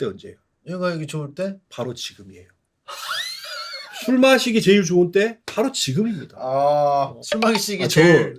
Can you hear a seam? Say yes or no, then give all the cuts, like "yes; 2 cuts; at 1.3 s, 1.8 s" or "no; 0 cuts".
yes; 1 cut; at 7.2 s